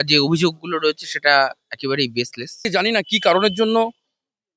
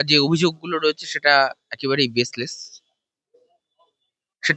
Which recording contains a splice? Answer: first; 1 cut; at 2.6 s

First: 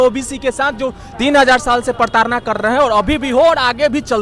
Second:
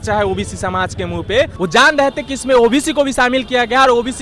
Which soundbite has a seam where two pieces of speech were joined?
second; 1 cut; at 1.5 s

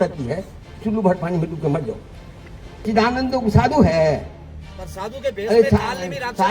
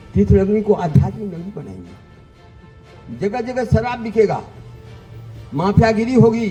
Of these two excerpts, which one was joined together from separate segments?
first; 1 cut; at 2.8 s

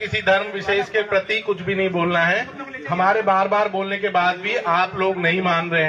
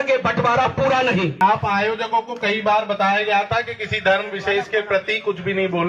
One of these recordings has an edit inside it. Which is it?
second; 1 cut; at 1.4 s

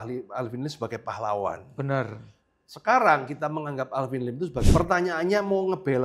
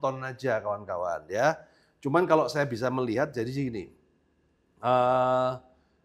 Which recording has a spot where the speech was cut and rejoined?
first; 1 cut; at 4.7 s

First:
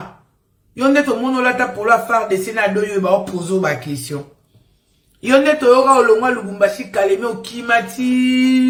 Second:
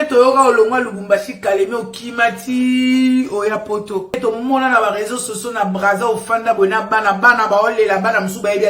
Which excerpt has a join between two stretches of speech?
second; 1 cut; at 4.1 s

